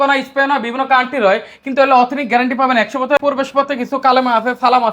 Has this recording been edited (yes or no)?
yes